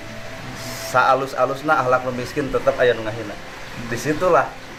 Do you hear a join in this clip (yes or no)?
no